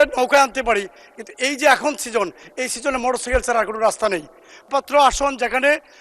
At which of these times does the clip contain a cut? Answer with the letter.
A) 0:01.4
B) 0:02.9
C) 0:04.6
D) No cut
C